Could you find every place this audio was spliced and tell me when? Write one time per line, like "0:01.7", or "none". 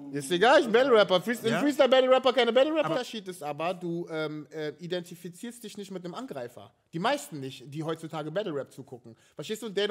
0:02.9

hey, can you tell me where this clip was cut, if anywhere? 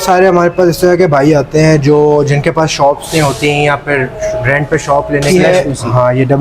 0:05.3

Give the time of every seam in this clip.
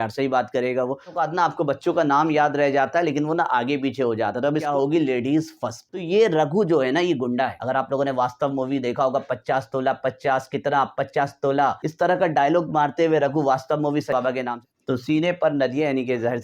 0:01.2
0:04.7
0:05.8
0:07.6
0:11.8
0:14.2

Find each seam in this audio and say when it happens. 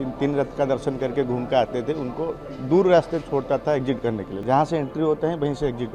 0:04.3

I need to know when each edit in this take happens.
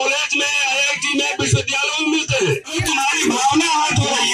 0:02.7

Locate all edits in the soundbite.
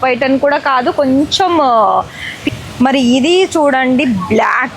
0:02.4

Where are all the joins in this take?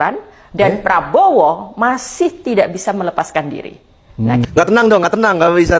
0:04.4

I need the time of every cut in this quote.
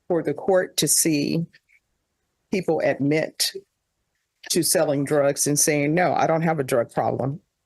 none

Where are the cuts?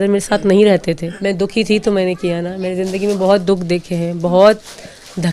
0:01.1

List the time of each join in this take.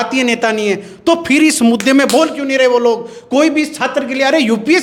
none

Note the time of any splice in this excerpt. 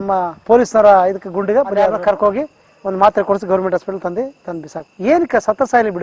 0:01.9

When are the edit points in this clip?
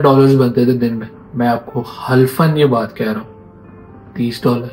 none

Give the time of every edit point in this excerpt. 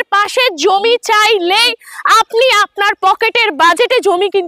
none

